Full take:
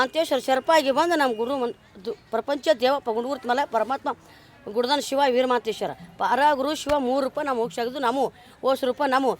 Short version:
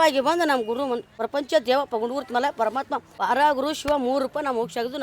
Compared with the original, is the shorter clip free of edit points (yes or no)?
no